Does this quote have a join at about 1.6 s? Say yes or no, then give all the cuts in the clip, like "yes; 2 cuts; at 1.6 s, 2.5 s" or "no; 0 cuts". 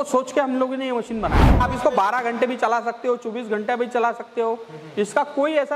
yes; 1 cut; at 1.6 s